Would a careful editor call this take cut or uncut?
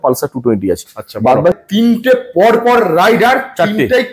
cut